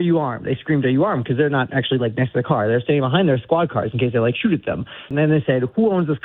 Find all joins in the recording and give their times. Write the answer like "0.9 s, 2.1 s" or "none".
5.1 s